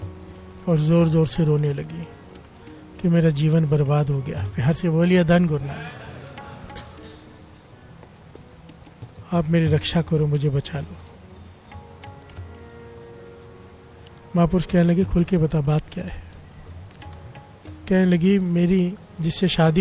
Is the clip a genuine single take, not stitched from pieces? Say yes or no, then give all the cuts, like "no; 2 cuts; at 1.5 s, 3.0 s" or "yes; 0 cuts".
yes; 0 cuts